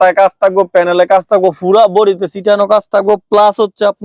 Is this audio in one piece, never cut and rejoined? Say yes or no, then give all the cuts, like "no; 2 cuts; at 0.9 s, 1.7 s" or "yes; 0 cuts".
yes; 0 cuts